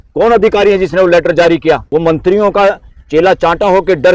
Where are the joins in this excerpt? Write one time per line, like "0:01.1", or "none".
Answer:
0:01.8